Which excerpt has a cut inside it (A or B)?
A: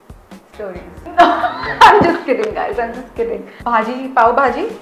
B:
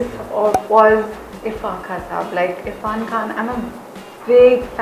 A